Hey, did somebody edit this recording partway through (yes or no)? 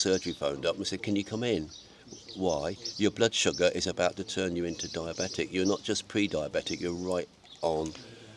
no